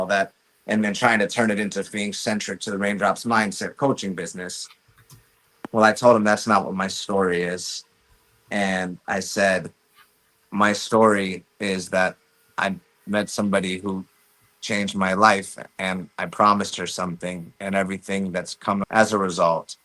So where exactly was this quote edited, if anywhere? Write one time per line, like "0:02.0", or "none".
0:18.8